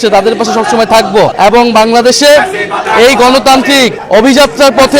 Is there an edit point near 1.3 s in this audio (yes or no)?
yes